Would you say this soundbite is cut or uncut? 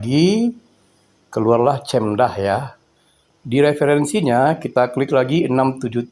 uncut